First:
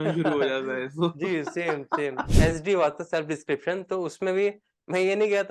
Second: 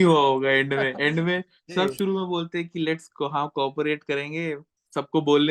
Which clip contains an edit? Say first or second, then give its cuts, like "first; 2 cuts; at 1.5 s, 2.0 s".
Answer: first; 1 cut; at 2.3 s